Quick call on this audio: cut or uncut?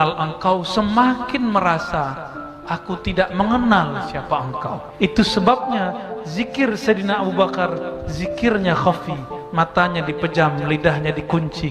cut